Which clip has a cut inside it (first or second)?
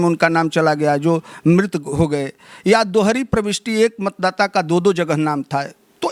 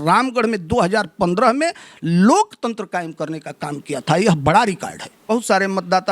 second